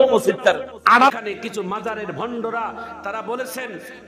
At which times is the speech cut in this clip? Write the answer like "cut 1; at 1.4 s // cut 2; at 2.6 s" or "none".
cut 1; at 1.1 s